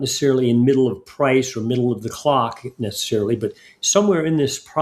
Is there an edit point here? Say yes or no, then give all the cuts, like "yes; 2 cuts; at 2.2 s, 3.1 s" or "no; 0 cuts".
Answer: no; 0 cuts